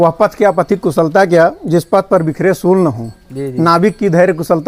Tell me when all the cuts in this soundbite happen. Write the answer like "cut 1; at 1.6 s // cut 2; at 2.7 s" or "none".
none